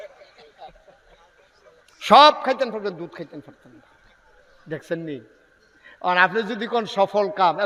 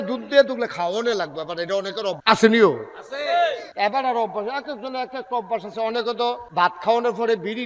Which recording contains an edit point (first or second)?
second